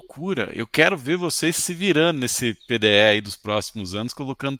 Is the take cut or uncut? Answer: uncut